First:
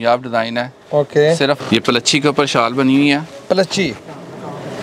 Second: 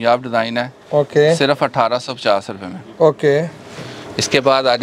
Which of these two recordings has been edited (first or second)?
first